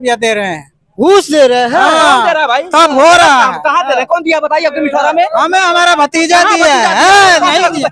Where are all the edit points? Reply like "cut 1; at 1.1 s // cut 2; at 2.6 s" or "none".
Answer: none